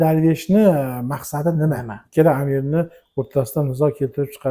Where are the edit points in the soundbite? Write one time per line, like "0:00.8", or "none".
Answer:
0:02.0